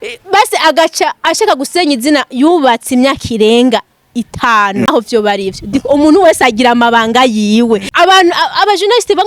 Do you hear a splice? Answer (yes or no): yes